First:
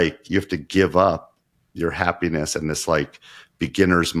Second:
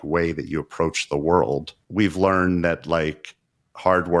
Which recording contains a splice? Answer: second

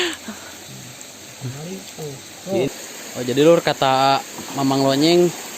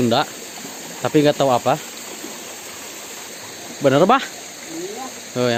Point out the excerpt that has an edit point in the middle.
first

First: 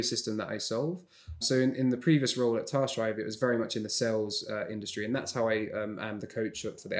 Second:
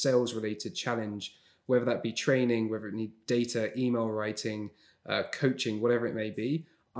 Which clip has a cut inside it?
first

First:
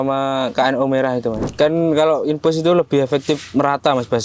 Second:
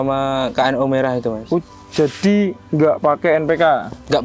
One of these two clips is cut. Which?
first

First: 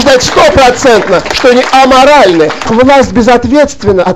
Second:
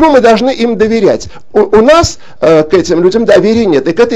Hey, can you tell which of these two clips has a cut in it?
first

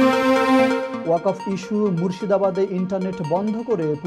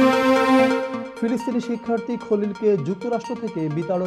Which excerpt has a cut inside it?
second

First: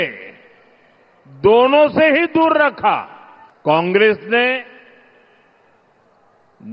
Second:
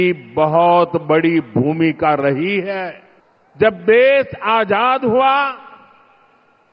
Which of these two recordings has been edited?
second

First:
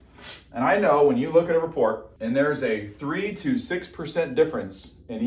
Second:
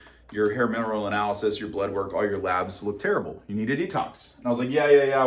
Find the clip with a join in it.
first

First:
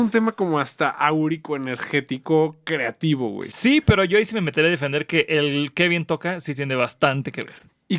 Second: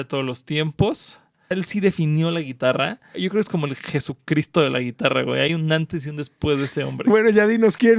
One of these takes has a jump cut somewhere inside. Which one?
second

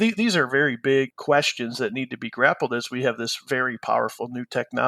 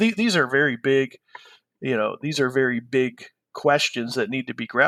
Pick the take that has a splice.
first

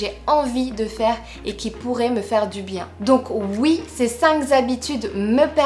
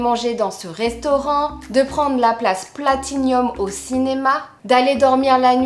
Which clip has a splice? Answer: first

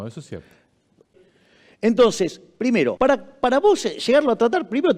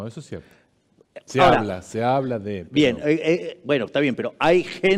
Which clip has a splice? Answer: first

